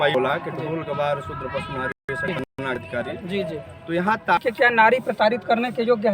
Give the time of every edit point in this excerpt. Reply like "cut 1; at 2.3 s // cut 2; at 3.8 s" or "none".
cut 1; at 4.4 s